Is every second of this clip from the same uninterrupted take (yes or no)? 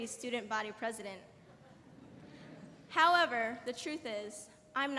no